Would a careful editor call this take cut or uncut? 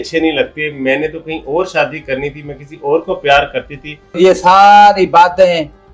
cut